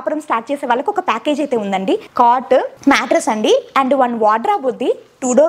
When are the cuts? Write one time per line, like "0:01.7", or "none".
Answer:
0:02.1
0:02.7